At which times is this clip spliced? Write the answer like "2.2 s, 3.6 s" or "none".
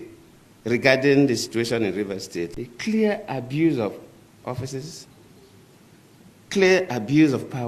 2.5 s